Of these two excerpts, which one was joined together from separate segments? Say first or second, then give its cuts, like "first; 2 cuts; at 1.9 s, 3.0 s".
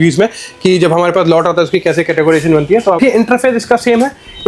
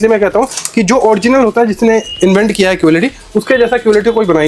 first; 1 cut; at 3.0 s